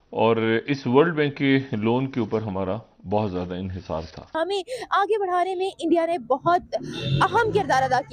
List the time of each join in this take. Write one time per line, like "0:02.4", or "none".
0:04.3